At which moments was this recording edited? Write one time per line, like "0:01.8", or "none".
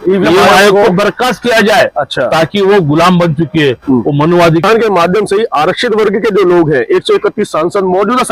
0:04.6